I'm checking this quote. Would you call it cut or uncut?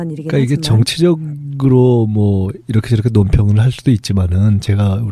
uncut